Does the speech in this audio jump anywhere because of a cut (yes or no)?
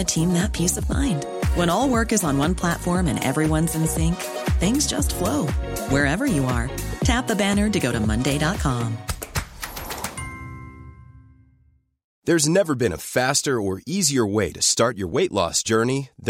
yes